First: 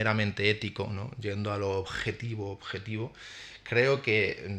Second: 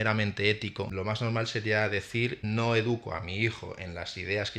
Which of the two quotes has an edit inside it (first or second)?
second